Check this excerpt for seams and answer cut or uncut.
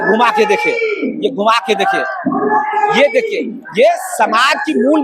uncut